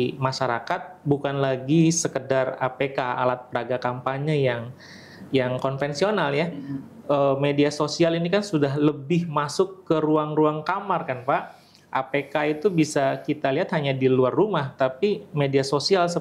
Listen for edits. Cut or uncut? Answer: uncut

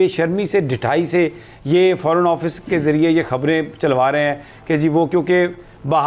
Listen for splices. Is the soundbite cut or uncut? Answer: uncut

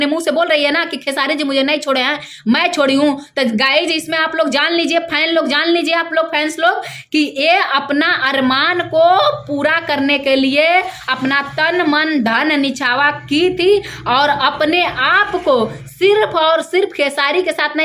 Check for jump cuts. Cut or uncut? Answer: uncut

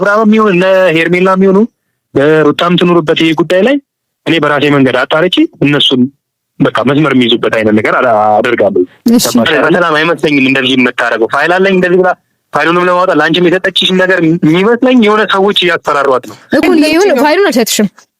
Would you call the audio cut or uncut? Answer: cut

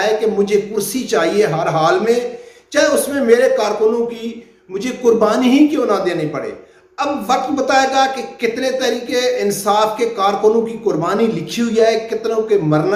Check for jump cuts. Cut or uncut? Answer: uncut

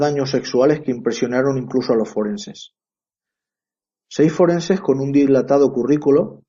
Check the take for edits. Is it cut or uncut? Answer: uncut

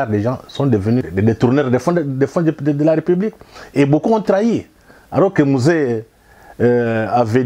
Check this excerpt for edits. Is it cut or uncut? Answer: cut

